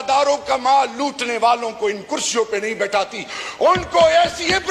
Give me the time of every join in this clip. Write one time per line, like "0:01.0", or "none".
none